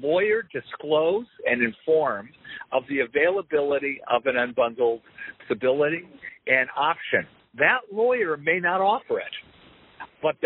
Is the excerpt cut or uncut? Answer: cut